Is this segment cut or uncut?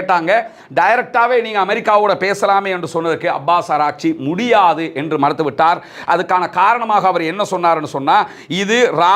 uncut